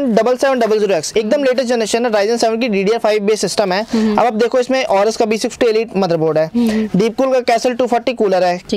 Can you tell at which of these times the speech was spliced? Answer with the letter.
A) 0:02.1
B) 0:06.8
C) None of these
C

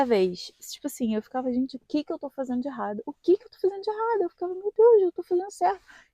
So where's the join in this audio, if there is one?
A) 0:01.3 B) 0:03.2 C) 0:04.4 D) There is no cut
D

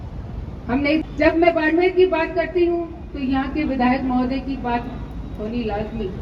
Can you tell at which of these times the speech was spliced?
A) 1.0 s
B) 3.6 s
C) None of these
A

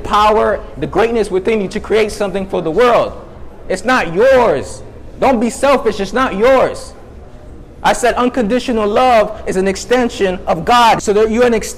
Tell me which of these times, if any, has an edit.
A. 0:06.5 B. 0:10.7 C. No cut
B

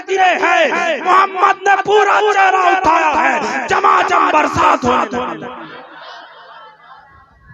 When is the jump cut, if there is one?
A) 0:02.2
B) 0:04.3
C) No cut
C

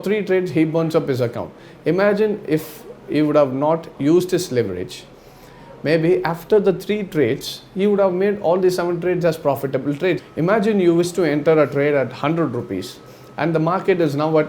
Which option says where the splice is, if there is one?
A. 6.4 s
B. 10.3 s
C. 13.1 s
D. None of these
B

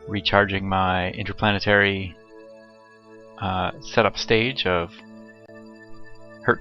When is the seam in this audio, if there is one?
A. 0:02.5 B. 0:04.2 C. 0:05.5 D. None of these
B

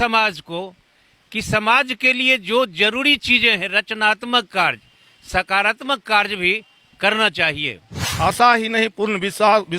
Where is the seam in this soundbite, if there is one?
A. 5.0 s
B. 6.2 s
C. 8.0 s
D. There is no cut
C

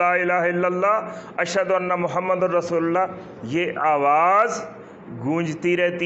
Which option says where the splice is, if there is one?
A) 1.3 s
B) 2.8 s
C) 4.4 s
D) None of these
D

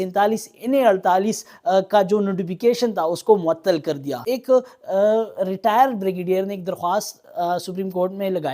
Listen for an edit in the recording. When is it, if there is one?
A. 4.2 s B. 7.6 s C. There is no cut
A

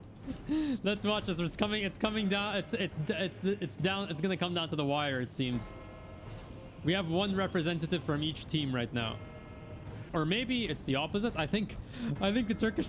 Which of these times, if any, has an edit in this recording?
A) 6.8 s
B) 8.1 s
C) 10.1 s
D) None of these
C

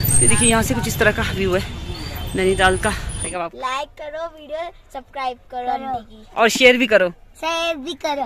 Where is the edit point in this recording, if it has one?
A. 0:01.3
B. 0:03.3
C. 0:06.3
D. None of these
B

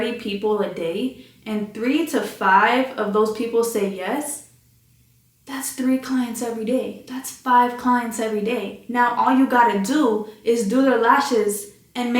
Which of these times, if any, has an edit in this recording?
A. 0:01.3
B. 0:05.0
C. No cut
C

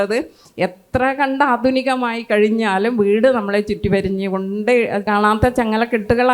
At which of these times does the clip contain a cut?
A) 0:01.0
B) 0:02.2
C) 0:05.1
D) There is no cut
C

